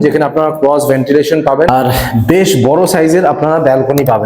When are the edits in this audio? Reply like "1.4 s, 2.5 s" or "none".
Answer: 1.7 s

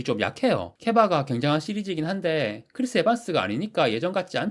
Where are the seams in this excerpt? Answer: none

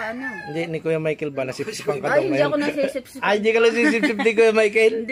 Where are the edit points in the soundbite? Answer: 2.9 s

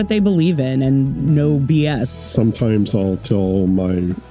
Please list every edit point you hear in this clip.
2.2 s

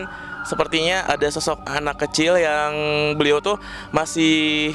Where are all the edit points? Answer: 1.0 s

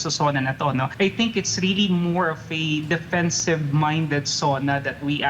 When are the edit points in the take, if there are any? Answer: 0.9 s

